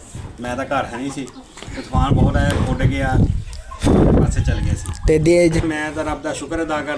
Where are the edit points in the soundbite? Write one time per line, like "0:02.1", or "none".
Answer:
0:05.6

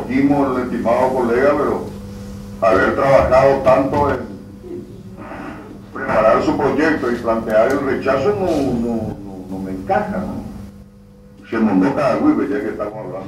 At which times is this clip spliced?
none

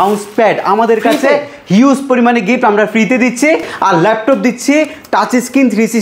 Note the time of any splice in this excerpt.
none

